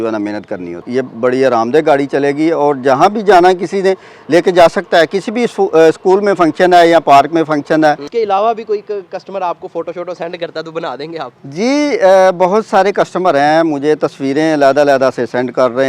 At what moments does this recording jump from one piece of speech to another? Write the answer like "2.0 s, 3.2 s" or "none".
0.8 s, 8.0 s